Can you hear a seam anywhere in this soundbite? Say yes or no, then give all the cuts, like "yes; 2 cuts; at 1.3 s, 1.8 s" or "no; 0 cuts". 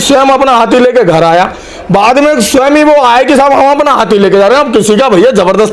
no; 0 cuts